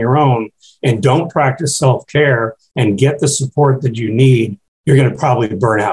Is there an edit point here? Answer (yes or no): yes